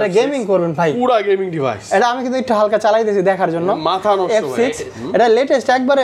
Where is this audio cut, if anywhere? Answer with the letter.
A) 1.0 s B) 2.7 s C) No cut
C